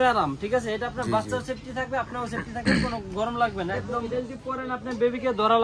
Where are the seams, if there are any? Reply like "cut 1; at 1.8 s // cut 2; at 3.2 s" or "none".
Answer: cut 1; at 3.9 s